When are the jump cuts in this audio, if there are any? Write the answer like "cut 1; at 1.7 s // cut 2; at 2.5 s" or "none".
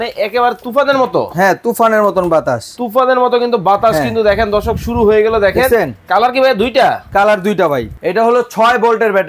cut 1; at 7.9 s